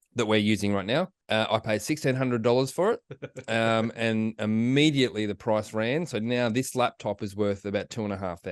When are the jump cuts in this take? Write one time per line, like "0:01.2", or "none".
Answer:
0:01.2